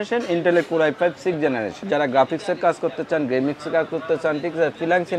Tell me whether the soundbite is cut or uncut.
cut